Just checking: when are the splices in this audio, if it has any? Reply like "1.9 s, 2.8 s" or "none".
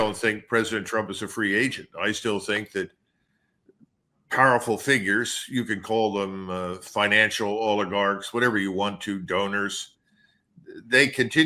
none